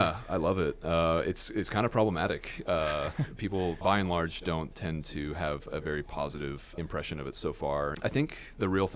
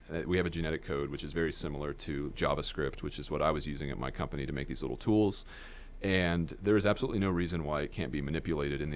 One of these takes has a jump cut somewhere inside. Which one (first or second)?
first